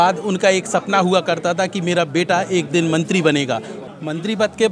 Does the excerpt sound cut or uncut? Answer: cut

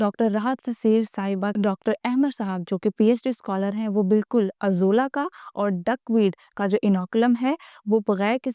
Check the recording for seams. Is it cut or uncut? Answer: cut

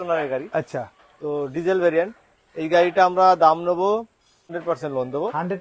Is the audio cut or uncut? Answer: cut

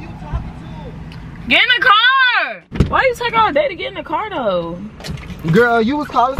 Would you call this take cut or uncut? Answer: uncut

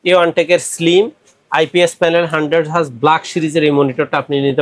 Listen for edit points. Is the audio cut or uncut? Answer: uncut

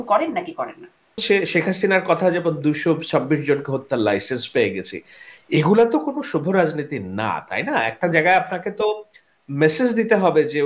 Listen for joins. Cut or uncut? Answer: cut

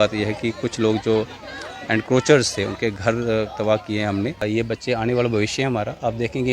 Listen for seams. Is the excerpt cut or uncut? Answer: cut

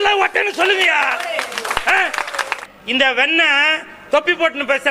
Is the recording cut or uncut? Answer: cut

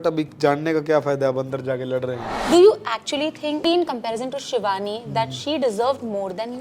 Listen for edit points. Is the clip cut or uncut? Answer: cut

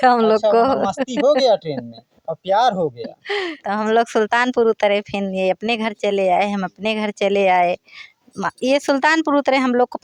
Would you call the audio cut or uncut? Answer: uncut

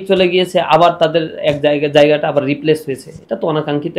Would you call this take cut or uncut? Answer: uncut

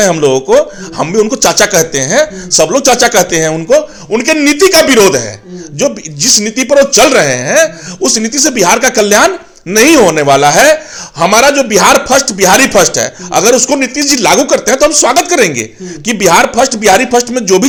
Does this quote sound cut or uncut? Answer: uncut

